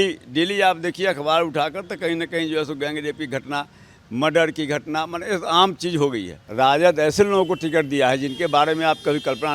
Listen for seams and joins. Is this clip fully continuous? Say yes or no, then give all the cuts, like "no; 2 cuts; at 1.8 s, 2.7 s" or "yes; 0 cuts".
no; 1 cut; at 6.4 s